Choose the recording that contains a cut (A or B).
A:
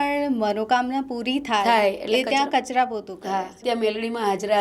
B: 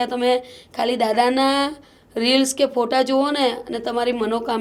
A